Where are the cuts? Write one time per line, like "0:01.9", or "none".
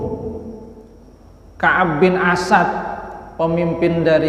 none